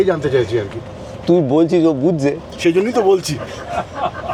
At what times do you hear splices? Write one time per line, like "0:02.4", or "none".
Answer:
none